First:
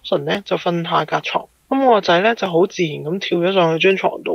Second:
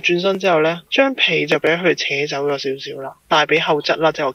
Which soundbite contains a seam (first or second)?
second